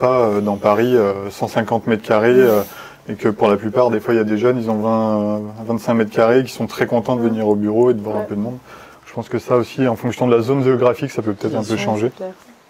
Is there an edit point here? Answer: no; 0 cuts

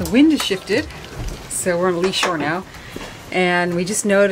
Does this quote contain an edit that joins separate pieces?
no; 0 cuts

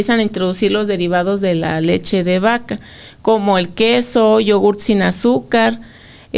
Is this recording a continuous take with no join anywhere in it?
yes; 0 cuts

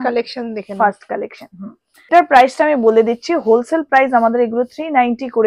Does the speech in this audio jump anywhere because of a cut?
yes; 1 cut; at 2.1 s

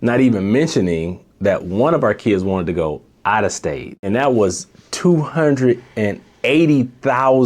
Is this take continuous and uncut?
no; 1 cut; at 4.1 s

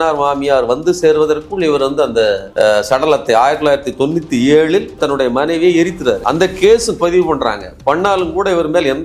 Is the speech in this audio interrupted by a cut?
no; 0 cuts

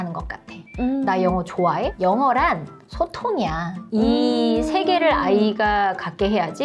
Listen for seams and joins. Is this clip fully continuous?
yes; 0 cuts

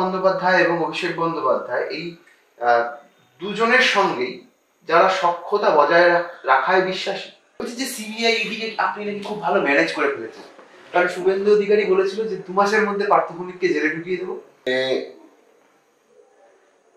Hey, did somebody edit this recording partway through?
yes; 2 cuts; at 7.5 s, 14.6 s

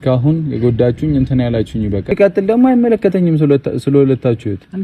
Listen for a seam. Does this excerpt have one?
yes; 1 cut; at 2.1 s

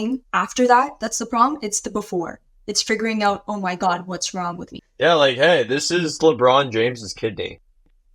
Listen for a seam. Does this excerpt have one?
yes; 1 cut; at 4.7 s

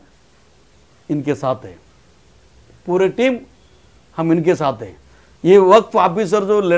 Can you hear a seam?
no; 0 cuts

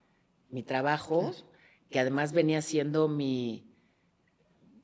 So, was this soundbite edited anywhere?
no; 0 cuts

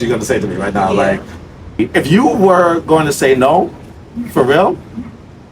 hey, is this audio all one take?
no; 1 cut; at 1.8 s

